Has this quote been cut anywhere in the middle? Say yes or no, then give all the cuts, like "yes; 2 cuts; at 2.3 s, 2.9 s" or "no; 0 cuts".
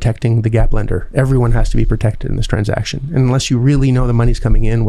no; 0 cuts